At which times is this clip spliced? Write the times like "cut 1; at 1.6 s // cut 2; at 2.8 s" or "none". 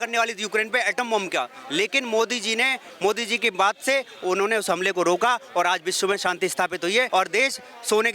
cut 1; at 7.1 s